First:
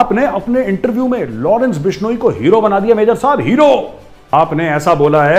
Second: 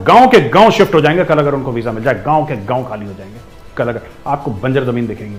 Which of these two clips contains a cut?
first; 1 cut; at 4.1 s

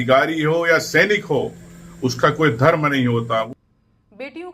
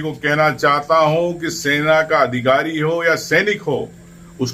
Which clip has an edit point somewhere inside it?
first; 1 cut; at 3.5 s

